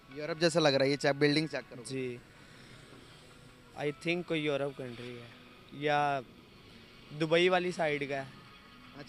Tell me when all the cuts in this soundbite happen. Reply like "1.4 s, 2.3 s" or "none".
none